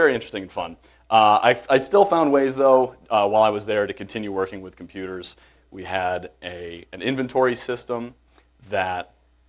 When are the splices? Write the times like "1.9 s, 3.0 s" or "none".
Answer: 3.4 s